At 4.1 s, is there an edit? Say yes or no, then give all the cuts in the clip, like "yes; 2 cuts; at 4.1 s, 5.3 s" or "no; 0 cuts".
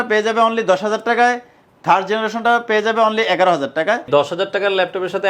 yes; 1 cut; at 4.1 s